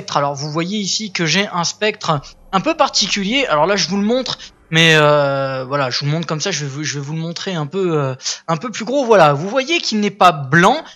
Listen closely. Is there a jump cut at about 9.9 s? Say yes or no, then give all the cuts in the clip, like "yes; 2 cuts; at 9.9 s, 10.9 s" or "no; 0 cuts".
yes; 1 cut; at 9.9 s